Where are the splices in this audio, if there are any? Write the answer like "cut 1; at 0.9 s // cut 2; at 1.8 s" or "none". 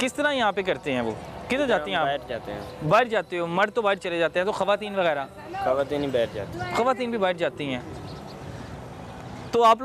none